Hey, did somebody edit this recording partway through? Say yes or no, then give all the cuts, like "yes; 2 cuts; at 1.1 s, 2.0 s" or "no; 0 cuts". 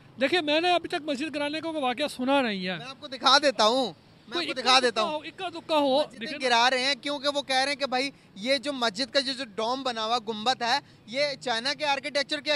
no; 0 cuts